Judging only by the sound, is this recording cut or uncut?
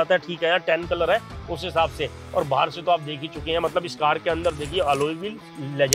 uncut